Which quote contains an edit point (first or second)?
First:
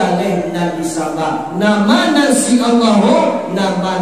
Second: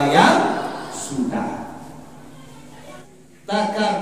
second